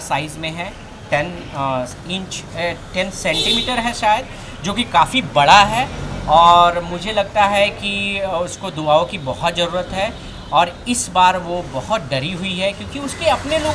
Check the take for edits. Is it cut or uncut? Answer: uncut